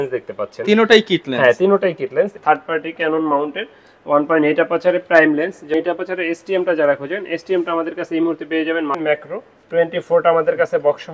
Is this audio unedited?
no; 3 cuts; at 2.3 s, 5.7 s, 9.0 s

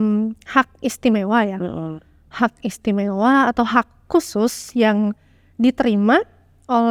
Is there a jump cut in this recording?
no; 0 cuts

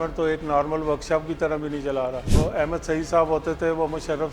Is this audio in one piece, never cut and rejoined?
no; 1 cut; at 2.4 s

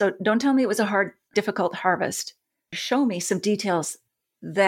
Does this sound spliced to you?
no; 0 cuts

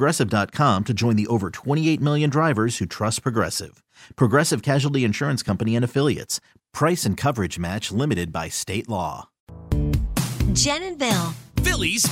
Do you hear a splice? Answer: yes; 1 cut; at 9.6 s

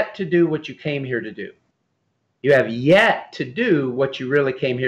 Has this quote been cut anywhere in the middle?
no; 0 cuts

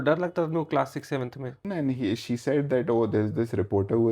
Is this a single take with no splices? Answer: no; 1 cut; at 1.6 s

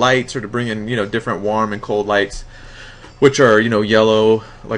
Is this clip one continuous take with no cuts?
no; 1 cut; at 2.4 s

